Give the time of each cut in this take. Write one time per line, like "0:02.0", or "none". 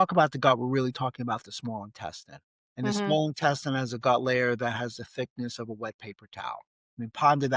0:03.1